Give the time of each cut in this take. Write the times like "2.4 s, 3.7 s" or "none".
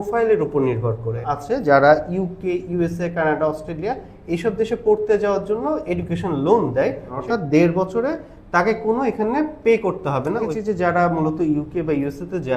1.3 s, 7.2 s, 10.4 s